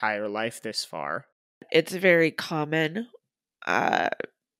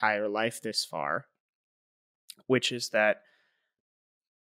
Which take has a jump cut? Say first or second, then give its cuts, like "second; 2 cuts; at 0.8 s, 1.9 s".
first; 1 cut; at 1.7 s